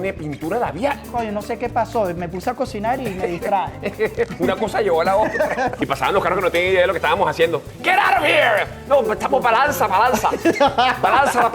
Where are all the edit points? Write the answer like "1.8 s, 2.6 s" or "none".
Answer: 1.1 s, 5.7 s